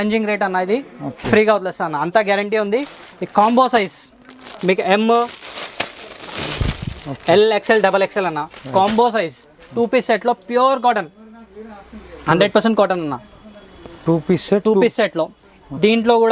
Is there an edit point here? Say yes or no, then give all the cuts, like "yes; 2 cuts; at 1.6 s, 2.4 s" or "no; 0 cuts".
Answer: no; 0 cuts